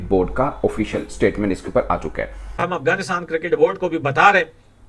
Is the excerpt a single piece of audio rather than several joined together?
no; 1 cut; at 2.5 s

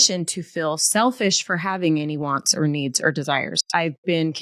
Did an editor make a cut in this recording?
no; 0 cuts

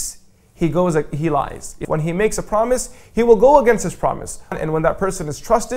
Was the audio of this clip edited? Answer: yes; 2 cuts; at 1.8 s, 4.6 s

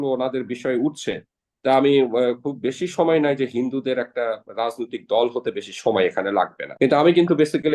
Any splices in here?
yes; 1 cut; at 6.6 s

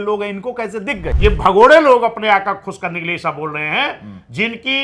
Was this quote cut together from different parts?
yes; 1 cut; at 1.0 s

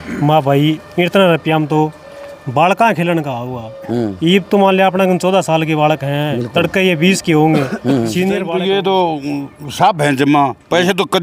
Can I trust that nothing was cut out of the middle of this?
no; 1 cut; at 8.4 s

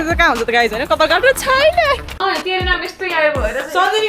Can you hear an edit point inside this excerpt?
yes; 1 cut; at 2.2 s

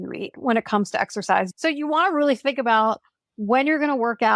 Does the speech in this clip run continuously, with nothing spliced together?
no; 1 cut; at 1.5 s

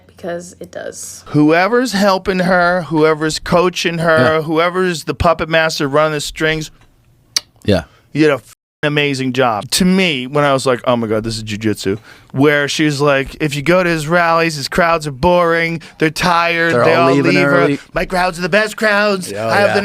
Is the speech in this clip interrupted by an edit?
yes; 2 cuts; at 1.2 s, 9.6 s

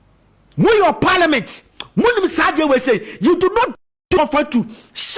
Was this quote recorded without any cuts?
yes; 0 cuts

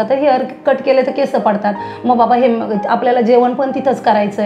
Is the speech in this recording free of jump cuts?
yes; 0 cuts

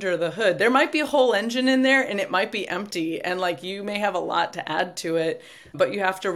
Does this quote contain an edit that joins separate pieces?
no; 0 cuts

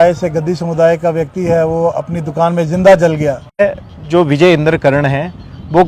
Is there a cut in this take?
yes; 1 cut; at 3.6 s

